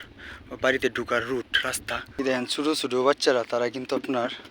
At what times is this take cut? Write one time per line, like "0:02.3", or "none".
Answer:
0:02.2